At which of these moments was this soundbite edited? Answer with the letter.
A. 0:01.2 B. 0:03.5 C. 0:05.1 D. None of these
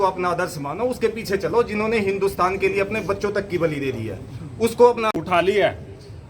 C